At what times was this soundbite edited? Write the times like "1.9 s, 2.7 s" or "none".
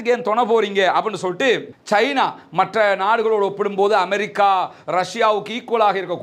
1.7 s